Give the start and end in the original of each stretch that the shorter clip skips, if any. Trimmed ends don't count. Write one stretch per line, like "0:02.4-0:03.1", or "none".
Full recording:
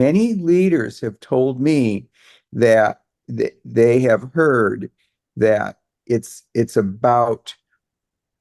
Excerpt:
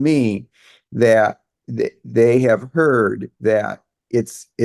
0:04.9-0:05.2